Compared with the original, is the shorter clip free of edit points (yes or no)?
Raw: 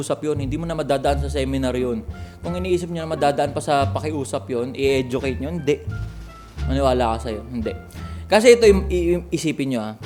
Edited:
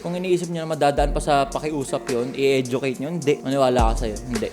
no